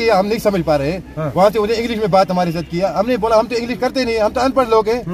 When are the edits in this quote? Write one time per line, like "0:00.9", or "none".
none